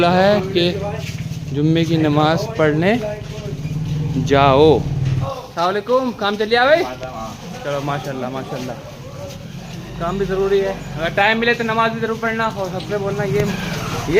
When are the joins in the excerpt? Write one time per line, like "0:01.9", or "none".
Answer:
0:05.2